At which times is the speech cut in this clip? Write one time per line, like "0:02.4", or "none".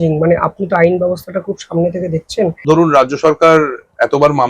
0:02.6